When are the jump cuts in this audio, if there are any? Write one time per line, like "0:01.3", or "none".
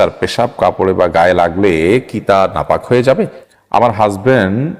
0:03.2